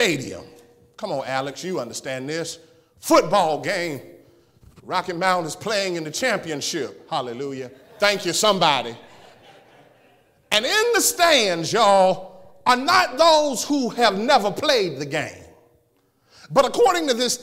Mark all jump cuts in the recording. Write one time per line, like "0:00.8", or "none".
0:07.8